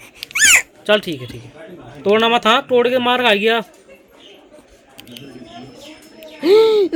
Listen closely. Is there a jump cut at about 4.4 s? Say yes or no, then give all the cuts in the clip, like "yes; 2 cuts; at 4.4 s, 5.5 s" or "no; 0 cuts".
no; 0 cuts